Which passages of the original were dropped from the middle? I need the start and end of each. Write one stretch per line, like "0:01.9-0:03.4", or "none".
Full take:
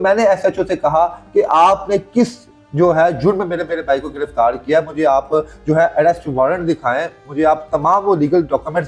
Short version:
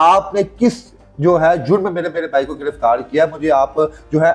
none